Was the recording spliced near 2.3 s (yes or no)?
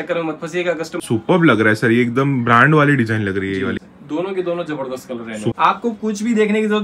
no